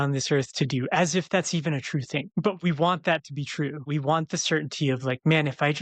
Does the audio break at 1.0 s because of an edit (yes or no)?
no